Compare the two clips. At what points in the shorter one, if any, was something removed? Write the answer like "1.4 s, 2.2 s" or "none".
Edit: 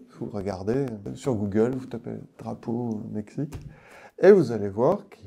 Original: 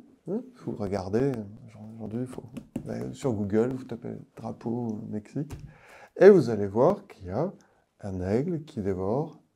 1.1 s

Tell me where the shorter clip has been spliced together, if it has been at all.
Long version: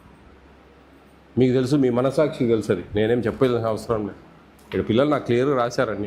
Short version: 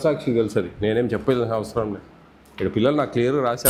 none

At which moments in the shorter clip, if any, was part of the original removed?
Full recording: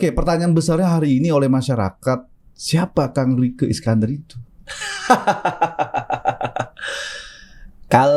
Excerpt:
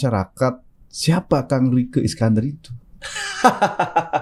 none

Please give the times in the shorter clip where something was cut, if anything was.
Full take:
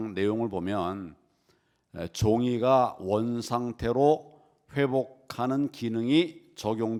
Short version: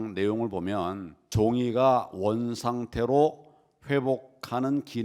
1.2 s

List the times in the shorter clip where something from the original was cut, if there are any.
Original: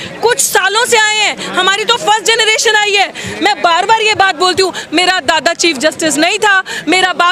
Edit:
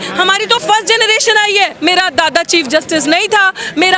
1.8 s

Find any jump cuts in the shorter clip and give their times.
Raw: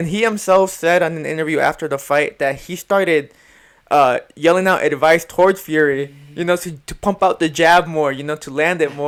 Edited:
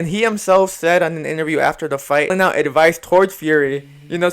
2.3 s

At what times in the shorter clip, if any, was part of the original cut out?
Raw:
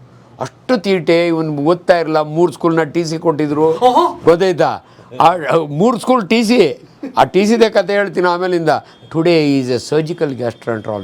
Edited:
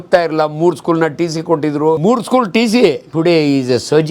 2.0 s, 3.1 s

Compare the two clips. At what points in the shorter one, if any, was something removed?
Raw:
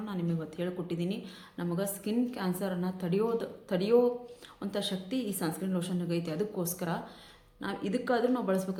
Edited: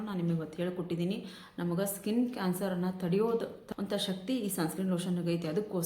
3.6 s

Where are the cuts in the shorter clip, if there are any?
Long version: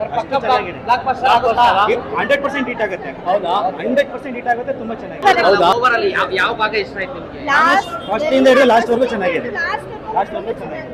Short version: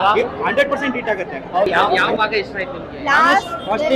2.0 s

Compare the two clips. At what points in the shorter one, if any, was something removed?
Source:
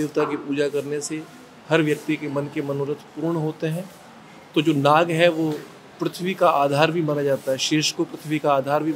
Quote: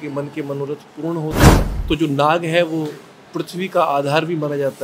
1.7 s

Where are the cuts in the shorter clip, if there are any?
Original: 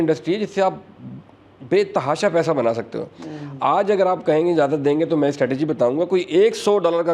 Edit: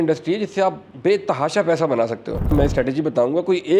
0.9 s, 2.5 s

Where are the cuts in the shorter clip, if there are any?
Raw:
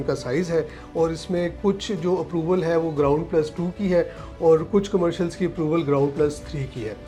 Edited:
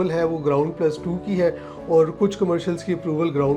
none

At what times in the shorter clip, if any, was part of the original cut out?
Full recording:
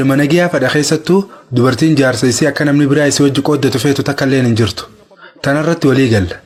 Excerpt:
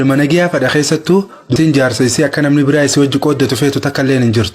1.5 s

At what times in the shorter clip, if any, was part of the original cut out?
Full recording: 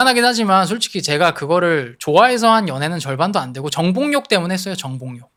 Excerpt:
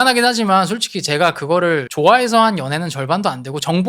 1.9 s

